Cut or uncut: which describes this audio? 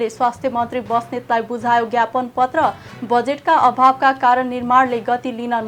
uncut